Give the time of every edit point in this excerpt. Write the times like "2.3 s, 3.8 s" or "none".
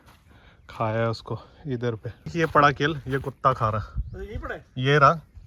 2.3 s